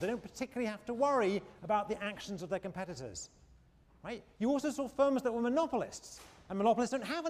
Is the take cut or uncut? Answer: cut